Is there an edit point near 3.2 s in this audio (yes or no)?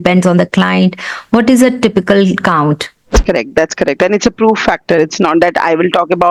yes